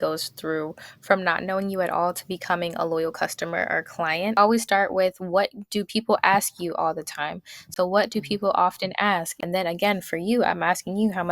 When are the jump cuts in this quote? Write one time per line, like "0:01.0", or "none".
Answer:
0:04.3
0:07.7
0:09.4